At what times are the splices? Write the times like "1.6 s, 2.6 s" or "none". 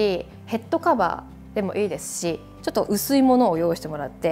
2.5 s